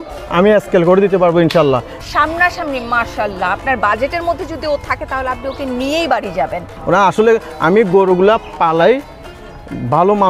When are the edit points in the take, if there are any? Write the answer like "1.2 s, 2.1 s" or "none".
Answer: 1.9 s, 6.7 s